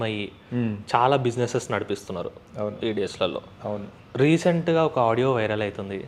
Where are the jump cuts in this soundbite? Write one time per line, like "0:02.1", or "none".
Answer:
none